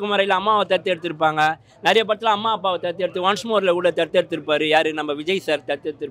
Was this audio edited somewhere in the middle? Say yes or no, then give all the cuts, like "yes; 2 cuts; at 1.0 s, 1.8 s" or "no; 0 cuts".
no; 0 cuts